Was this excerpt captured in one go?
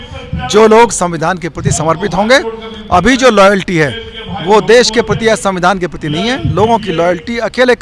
yes; 0 cuts

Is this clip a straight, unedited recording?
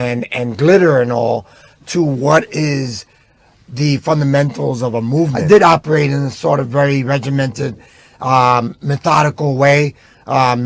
no; 1 cut; at 5.4 s

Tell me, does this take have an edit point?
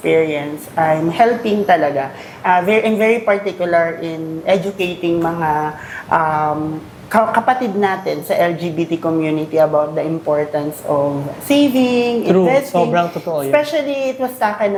no; 0 cuts

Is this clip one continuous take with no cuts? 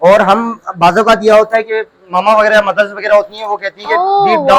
yes; 0 cuts

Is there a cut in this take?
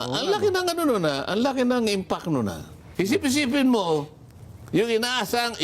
yes; 1 cut; at 2.8 s

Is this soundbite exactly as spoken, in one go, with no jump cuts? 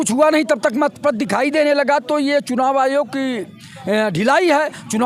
yes; 0 cuts

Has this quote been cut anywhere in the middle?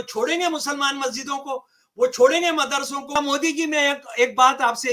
yes; 1 cut; at 3.2 s

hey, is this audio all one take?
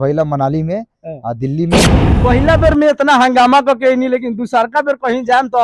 no; 1 cut; at 2.1 s

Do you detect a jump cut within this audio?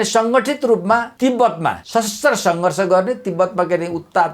yes; 2 cuts; at 1.1 s, 1.8 s

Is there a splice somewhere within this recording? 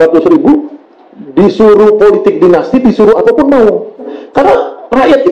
yes; 1 cut; at 4.2 s

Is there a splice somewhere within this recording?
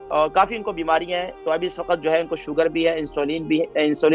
yes; 1 cut; at 1.3 s

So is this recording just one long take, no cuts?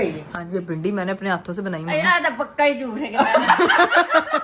yes; 0 cuts

